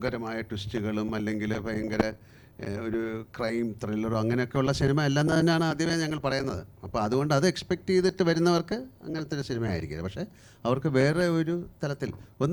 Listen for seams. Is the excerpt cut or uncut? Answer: uncut